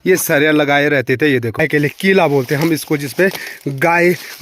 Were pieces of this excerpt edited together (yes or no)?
yes